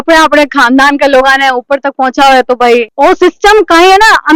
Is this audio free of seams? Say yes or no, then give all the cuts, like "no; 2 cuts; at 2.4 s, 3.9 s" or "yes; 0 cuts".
yes; 0 cuts